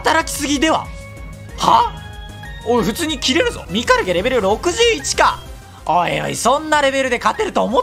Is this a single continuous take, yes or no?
no